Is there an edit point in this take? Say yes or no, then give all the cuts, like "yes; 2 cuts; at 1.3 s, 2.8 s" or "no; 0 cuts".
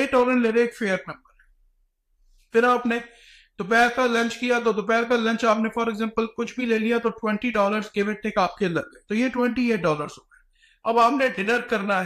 no; 0 cuts